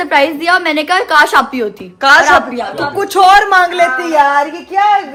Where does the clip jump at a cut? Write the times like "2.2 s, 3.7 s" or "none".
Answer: none